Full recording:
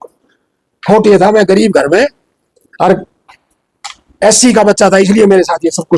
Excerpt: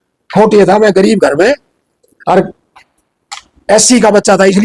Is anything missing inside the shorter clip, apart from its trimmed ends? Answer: no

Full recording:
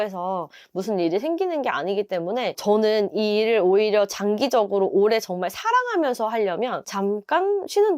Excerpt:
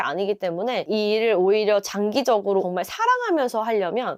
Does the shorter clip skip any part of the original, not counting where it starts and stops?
yes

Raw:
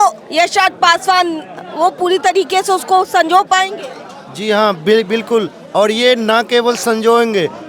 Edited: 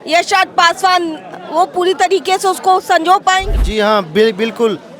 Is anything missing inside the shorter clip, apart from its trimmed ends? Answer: yes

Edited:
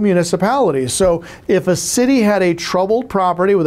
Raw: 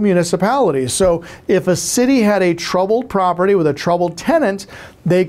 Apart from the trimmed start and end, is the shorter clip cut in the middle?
no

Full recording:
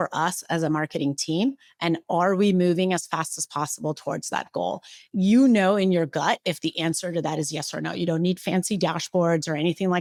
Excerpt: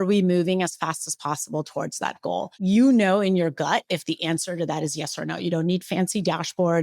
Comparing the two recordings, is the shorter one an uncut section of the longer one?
no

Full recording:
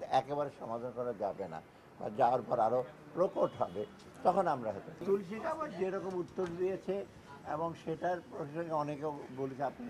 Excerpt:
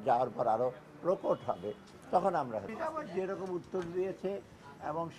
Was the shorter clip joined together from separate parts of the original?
yes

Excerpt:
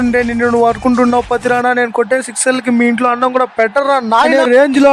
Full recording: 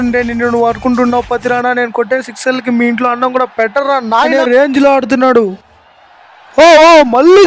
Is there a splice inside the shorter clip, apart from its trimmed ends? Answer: no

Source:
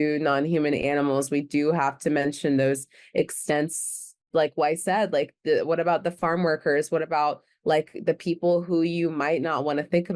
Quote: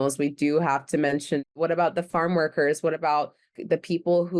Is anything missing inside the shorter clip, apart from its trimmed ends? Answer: yes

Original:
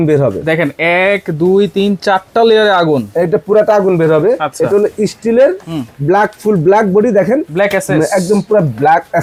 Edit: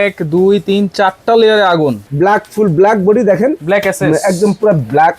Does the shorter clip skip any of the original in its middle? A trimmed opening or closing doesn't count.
yes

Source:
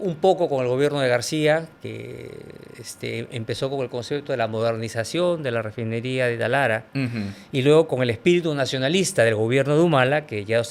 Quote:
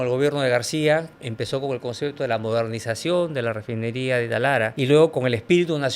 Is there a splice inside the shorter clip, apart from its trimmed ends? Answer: yes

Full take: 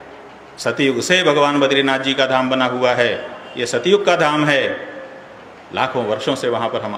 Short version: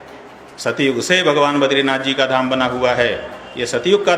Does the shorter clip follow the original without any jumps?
yes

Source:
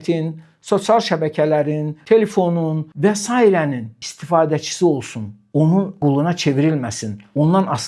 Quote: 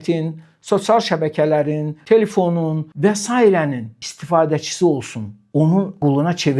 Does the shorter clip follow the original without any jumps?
yes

